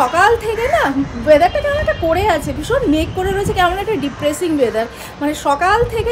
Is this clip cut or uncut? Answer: uncut